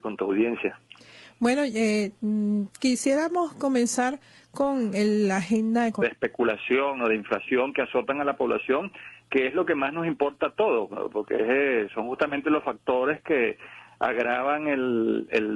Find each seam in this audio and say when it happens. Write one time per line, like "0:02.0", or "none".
none